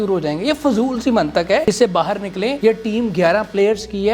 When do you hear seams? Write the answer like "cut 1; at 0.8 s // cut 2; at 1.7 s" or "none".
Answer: cut 1; at 1.6 s // cut 2; at 2.6 s